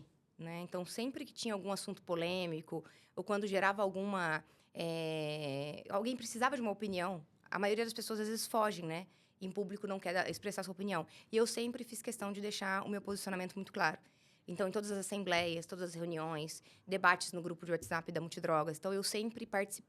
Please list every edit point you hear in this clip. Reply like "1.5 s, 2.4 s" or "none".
none